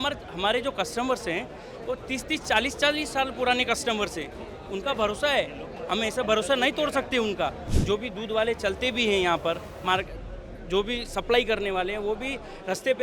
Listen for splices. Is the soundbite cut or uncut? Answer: cut